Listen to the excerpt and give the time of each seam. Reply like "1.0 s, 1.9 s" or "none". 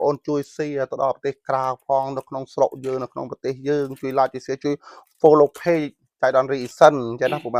none